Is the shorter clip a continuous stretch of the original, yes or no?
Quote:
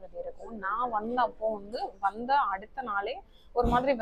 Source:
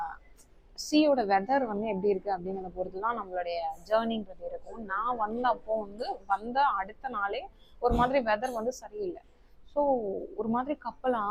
yes